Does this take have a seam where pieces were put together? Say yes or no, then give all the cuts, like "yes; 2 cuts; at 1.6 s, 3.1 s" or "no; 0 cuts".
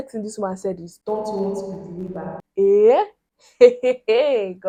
no; 0 cuts